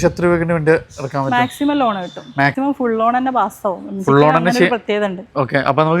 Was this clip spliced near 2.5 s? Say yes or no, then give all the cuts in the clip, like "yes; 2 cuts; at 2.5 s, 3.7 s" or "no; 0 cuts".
yes; 1 cut; at 2.5 s